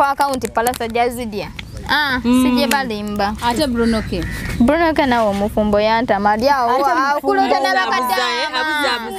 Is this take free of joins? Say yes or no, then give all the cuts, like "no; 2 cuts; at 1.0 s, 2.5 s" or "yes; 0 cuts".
yes; 0 cuts